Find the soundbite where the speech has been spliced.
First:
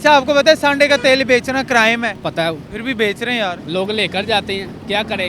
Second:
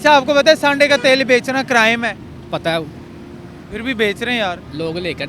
first; 2 cuts; at 2.3 s, 3.6 s

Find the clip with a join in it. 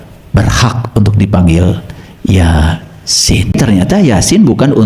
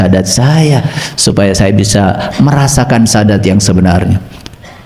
first; 1 cut; at 3.5 s

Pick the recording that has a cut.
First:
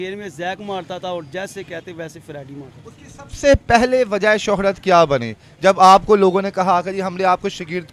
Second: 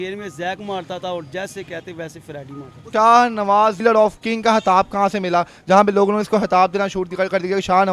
second; 2 cuts; at 2.8 s, 3.8 s

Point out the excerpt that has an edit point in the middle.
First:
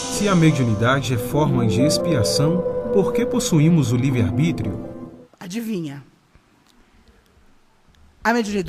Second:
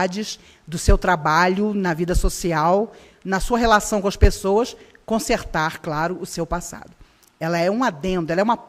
second; 1 cut; at 6.5 s

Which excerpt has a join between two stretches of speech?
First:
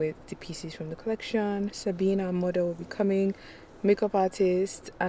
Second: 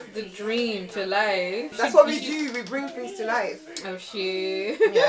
second; 1 cut; at 1.7 s

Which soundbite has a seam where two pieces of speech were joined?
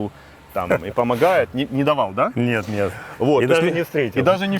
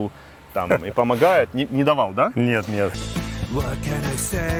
first; 1 cut; at 3.0 s

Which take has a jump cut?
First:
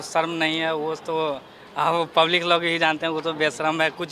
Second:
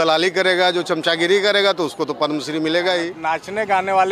second; 1 cut; at 3.1 s

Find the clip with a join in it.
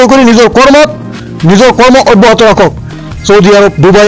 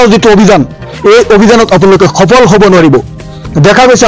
first; 1 cut; at 2.9 s

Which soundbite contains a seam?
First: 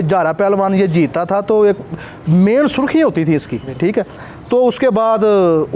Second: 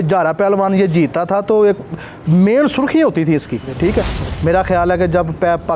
second; 1 cut; at 4.2 s

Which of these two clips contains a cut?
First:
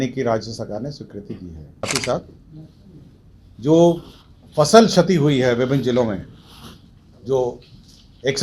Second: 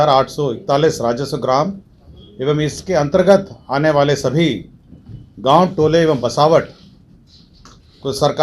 first; 1 cut; at 1.6 s

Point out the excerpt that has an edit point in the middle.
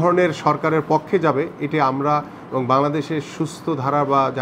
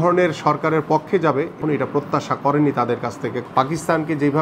second; 2 cuts; at 1.6 s, 3.4 s

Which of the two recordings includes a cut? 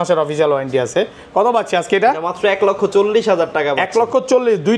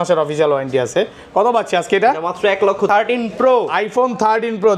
second; 1 cut; at 2.9 s

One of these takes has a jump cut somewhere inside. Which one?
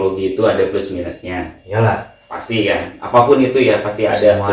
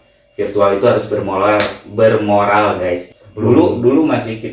second; 1 cut; at 3.1 s

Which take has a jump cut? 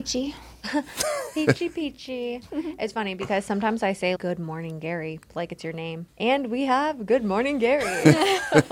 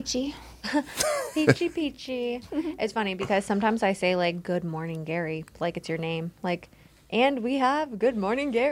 first; 2 cuts; at 4.2 s, 6.0 s

